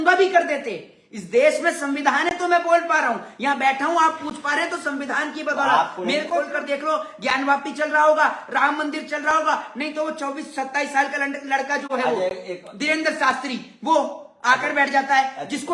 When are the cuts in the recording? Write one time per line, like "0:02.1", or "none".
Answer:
0:06.3